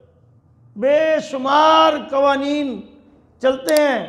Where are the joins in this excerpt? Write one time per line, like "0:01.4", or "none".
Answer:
none